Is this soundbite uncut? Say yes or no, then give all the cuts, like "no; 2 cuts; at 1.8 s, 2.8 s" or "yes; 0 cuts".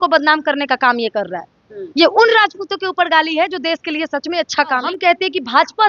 no; 1 cut; at 4.9 s